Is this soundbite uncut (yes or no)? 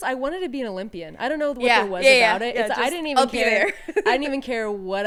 yes